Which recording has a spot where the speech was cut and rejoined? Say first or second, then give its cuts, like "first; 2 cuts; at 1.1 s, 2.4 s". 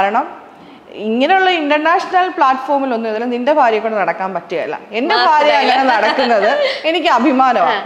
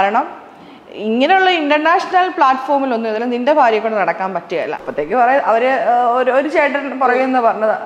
second; 1 cut; at 4.8 s